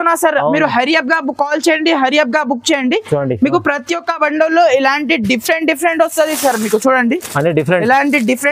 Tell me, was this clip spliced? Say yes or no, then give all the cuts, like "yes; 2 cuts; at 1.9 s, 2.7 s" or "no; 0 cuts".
no; 0 cuts